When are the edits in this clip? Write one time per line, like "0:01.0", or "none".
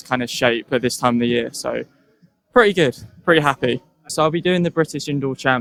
none